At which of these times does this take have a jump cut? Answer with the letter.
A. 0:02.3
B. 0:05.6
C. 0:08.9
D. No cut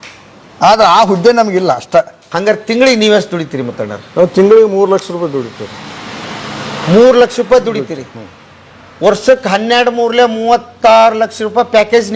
A